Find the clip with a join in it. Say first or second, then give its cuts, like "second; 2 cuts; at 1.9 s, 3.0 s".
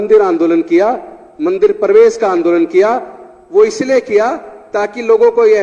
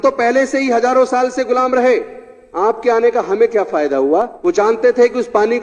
second; 1 cut; at 4.3 s